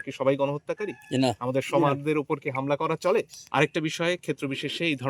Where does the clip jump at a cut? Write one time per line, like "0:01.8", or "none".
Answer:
0:03.4